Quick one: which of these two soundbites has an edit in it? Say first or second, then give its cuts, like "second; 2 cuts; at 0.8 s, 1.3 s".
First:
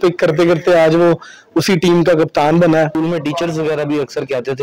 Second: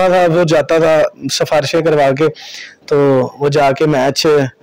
first; 1 cut; at 2.9 s